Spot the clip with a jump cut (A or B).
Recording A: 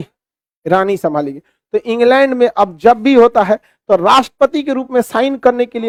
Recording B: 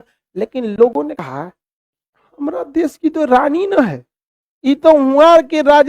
B